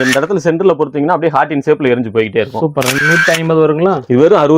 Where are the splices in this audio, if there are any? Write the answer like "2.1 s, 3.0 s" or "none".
3.0 s